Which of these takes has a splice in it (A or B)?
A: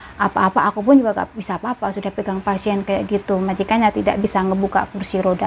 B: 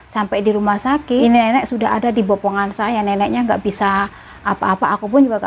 B